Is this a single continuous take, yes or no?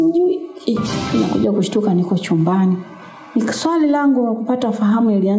no